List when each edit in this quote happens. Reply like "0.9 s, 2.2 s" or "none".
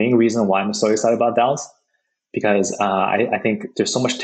none